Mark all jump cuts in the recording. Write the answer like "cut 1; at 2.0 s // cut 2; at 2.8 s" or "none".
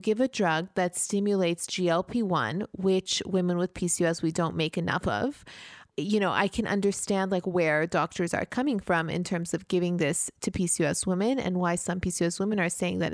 none